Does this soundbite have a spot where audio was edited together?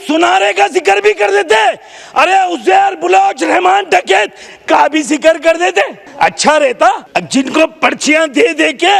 yes; 2 cuts; at 6.0 s, 7.1 s

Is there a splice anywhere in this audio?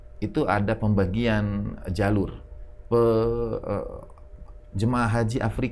no; 0 cuts

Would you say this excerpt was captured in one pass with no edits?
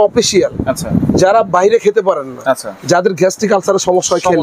yes; 0 cuts

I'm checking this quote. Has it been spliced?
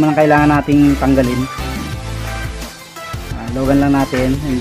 no; 0 cuts

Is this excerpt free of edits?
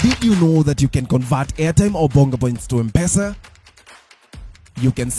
yes; 0 cuts

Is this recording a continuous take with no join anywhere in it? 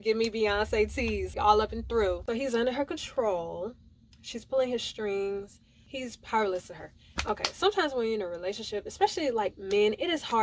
yes; 0 cuts

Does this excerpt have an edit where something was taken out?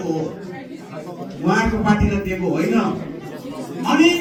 no; 0 cuts

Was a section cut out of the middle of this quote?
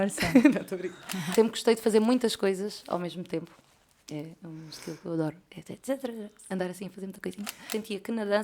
yes; 2 cuts; at 1.2 s, 7.6 s

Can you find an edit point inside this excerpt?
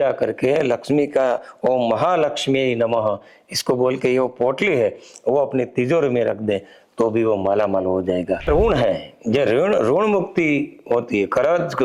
yes; 1 cut; at 8.5 s

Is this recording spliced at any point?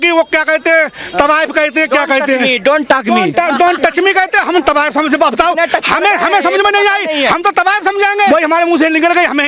yes; 1 cut; at 8.3 s

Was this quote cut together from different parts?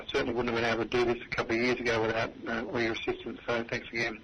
no; 0 cuts

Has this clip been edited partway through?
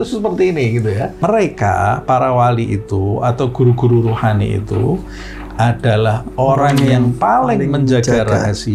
yes; 1 cut; at 1.2 s

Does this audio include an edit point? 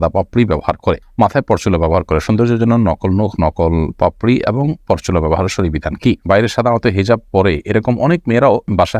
yes; 1 cut; at 6.2 s

